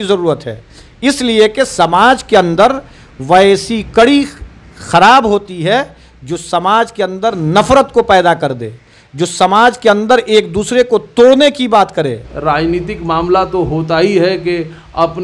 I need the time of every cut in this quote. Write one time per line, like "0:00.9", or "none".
0:12.3